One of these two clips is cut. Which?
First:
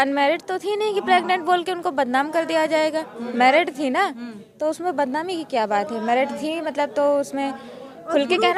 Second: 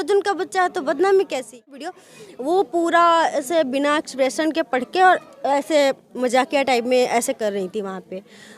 second; 1 cut; at 1.9 s

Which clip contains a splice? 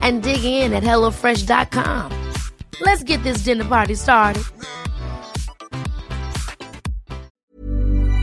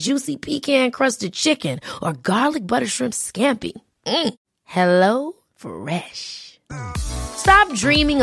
first; 1 cut; at 7.3 s

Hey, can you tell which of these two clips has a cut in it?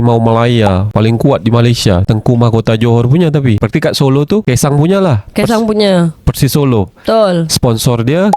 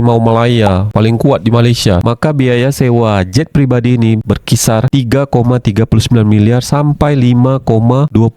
second; 1 cut; at 2.0 s

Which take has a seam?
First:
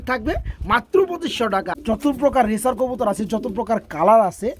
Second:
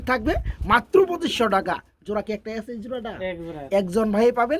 first; 1 cut; at 1.2 s

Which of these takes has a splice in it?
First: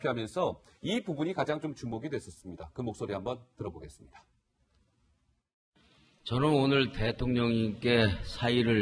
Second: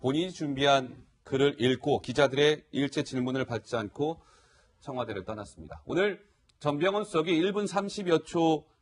first; 1 cut; at 7.0 s

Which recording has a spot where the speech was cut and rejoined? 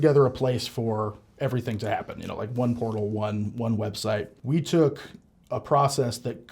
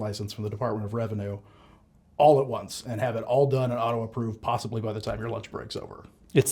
first; 1 cut; at 4.3 s

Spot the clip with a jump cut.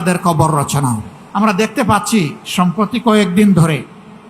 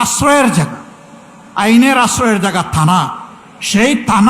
first; 1 cut; at 1.1 s

